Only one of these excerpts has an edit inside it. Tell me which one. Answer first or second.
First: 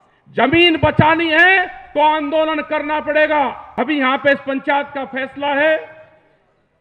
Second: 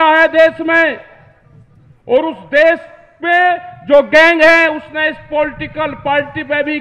first